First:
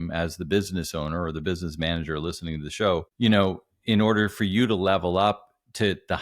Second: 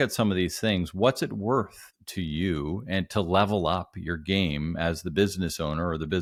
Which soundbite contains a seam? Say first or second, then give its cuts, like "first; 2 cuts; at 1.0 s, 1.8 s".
first; 1 cut; at 3.1 s